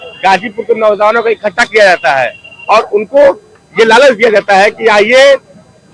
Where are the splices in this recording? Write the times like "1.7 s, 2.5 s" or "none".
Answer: none